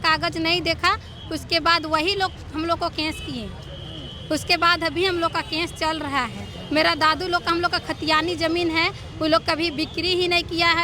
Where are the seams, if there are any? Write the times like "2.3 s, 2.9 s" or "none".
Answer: none

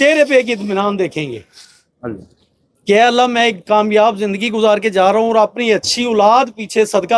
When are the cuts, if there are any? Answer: none

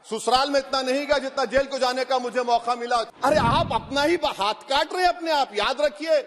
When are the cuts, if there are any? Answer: 3.1 s

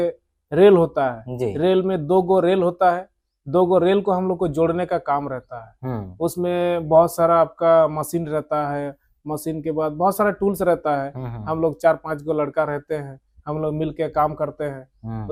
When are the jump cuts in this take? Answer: none

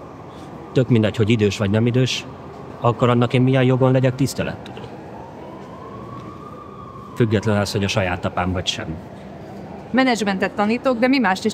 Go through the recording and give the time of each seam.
2.7 s, 9.8 s

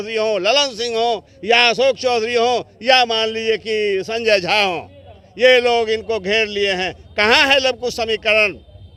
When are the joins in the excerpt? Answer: none

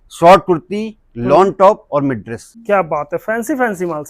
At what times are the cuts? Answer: 2.5 s

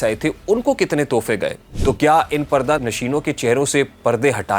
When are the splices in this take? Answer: 1.7 s, 2.8 s

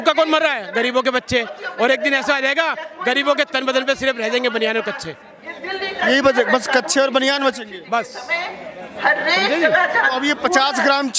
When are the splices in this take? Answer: none

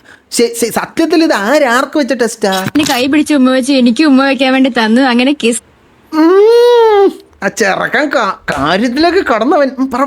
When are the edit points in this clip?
2.7 s

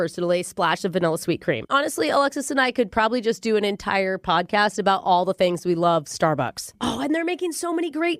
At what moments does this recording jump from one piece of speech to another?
1.6 s

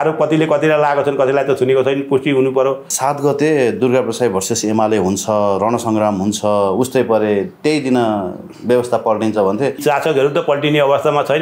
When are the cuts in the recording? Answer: 2.9 s, 9.8 s

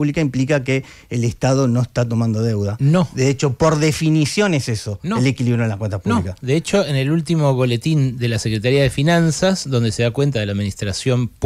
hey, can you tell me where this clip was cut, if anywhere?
none

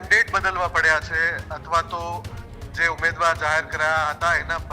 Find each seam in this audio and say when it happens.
none

